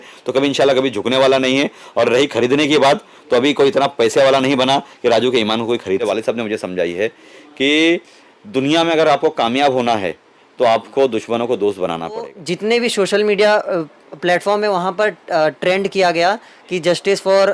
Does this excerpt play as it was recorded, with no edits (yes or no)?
no